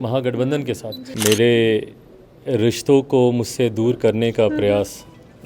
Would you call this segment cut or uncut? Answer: cut